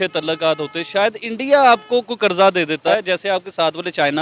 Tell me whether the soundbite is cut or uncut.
uncut